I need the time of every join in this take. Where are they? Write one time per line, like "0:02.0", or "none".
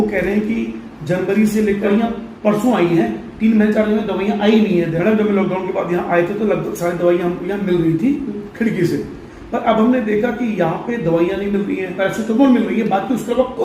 0:01.9
0:04.9
0:11.9

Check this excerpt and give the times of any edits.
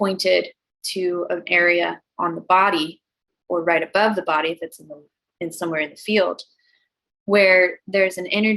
none

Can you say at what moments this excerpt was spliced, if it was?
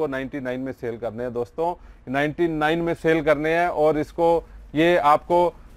none

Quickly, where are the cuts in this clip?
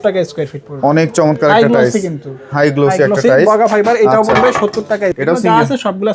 0:05.2

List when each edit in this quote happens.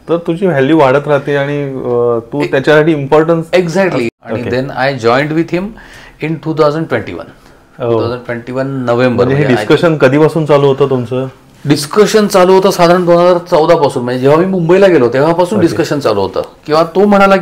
0:04.1

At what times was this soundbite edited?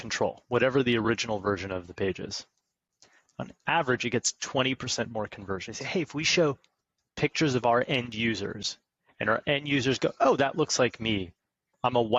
0:05.7

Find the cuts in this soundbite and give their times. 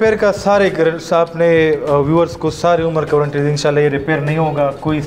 none

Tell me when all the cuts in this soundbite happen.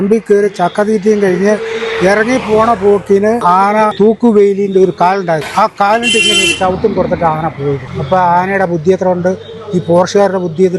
0:03.8
0:05.5
0:07.9

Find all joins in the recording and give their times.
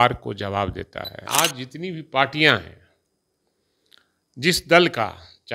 0:01.2

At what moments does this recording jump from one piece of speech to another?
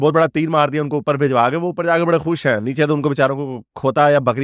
none

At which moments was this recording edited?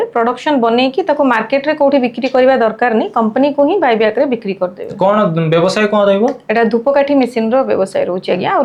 none

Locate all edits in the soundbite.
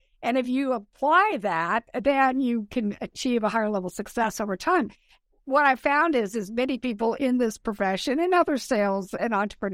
0:00.9

